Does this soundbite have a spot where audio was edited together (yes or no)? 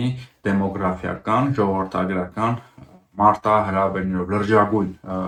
no